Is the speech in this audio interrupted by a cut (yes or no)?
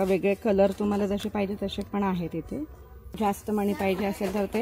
yes